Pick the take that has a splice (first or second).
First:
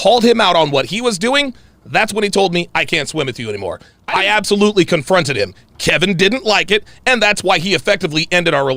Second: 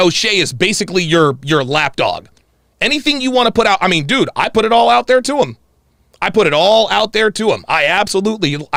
first